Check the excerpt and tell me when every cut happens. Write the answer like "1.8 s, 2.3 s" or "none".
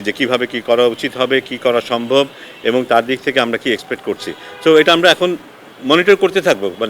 none